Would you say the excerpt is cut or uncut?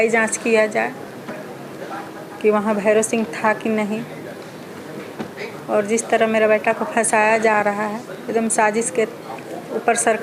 uncut